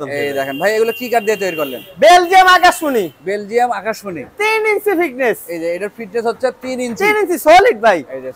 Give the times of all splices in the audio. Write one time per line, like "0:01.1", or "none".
none